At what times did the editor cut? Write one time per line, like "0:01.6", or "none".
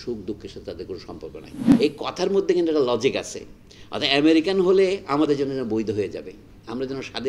0:01.6